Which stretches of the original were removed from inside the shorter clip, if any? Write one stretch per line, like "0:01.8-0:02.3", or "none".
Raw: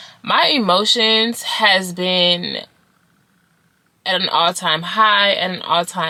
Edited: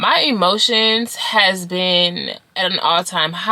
0:02.6-0:03.9